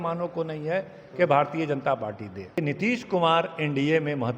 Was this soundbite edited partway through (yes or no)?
yes